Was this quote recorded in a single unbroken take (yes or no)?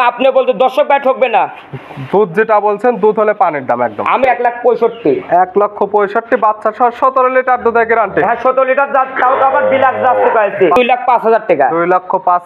no